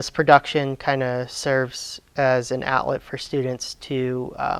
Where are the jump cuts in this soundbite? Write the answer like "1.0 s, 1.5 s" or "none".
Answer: none